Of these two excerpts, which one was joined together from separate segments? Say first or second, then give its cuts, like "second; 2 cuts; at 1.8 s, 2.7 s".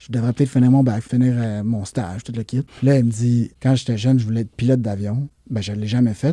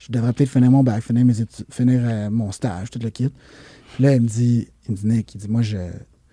first; 4 cuts; at 1.0 s, 2.7 s, 3.5 s, 5.4 s